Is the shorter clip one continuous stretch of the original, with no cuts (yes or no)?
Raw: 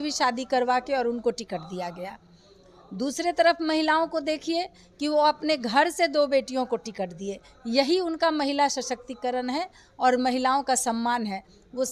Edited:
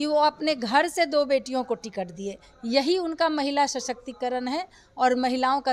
yes